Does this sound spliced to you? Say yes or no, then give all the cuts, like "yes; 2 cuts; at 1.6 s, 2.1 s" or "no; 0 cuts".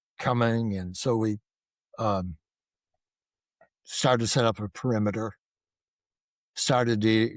no; 0 cuts